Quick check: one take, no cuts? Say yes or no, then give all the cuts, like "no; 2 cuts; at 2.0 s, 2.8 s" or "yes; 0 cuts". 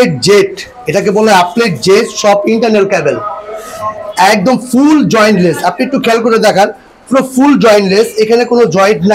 yes; 0 cuts